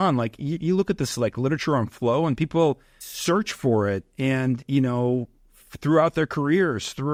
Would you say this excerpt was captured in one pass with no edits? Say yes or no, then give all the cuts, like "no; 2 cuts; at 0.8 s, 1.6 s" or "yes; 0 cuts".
yes; 0 cuts